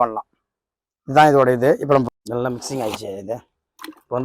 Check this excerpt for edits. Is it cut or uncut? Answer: cut